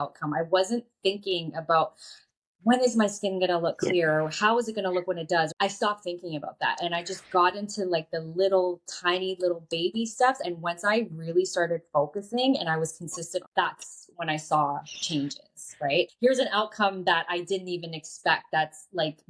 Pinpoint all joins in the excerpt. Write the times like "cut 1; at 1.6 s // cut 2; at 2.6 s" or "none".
cut 1; at 5.5 s // cut 2; at 10.4 s // cut 3; at 13.5 s // cut 4; at 16.1 s